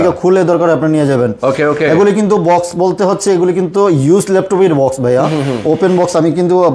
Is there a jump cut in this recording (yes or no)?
no